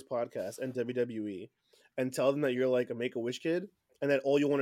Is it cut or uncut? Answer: uncut